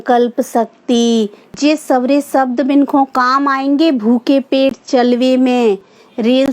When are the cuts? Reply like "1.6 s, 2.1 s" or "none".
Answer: 1.4 s